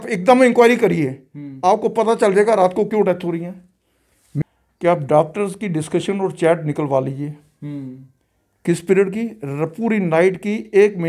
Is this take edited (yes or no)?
yes